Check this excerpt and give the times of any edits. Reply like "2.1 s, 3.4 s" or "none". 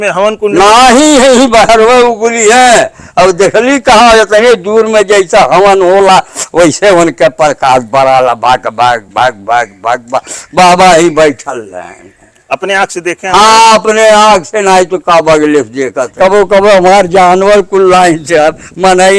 16.0 s